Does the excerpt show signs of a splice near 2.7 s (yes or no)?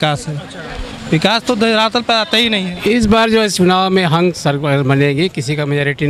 yes